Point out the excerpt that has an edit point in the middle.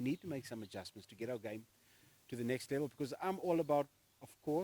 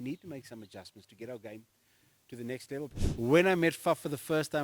second; 1 cut; at 2.9 s

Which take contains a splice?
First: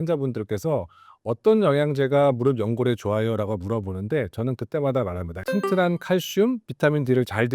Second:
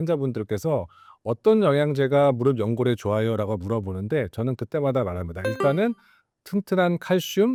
first; 1 cut; at 5.3 s

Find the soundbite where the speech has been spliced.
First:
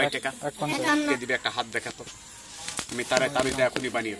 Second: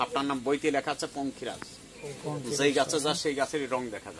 first; 1 cut; at 1.1 s

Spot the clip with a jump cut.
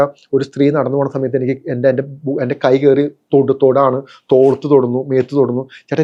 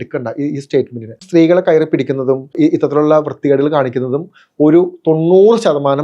second; 2 cuts; at 1.2 s, 2.5 s

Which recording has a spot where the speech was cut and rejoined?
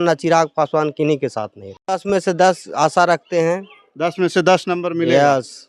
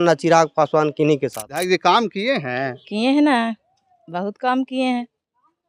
second; 1 cut; at 1.6 s

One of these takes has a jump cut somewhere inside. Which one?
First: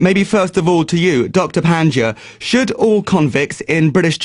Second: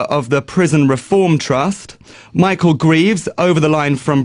second; 1 cut; at 1.5 s

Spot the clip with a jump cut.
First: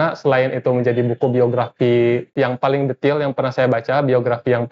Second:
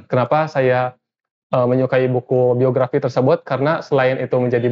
first; 1 cut; at 2.3 s

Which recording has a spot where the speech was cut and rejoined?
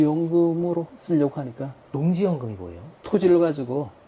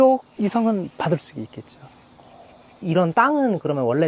first; 2 cuts; at 0.9 s, 2.9 s

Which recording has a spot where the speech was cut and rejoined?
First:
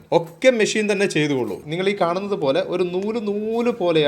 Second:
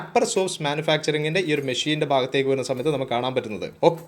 first; 1 cut; at 1.6 s

